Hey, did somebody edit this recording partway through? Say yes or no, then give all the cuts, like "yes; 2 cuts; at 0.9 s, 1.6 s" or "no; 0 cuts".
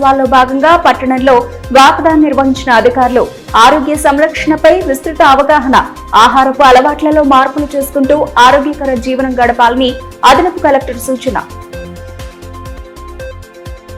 no; 0 cuts